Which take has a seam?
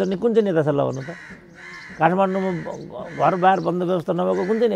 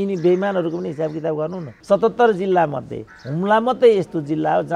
second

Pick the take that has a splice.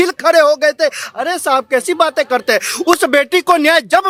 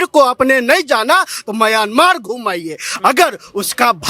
second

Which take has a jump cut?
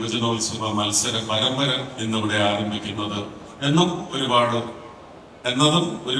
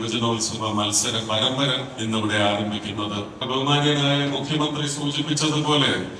second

